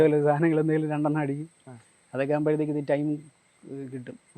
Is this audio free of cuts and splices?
yes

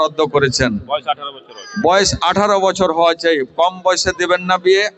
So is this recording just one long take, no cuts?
yes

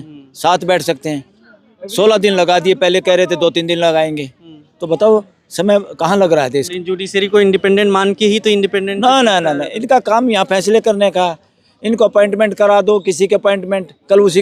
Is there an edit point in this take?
yes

